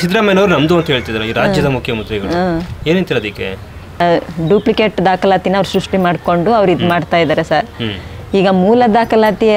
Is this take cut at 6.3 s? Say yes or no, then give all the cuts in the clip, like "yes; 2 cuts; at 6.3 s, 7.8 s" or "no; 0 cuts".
no; 1 cut; at 4.0 s